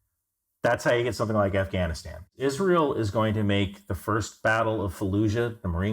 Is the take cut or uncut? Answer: cut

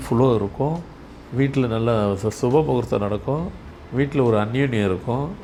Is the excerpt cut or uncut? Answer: uncut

